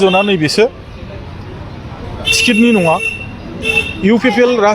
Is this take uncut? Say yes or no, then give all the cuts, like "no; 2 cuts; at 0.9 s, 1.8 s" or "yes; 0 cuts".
yes; 0 cuts